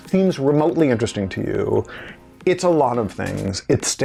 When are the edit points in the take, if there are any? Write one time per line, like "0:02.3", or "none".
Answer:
none